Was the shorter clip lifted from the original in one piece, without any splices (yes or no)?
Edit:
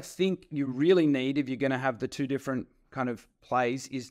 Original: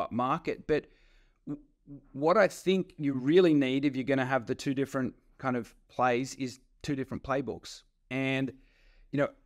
yes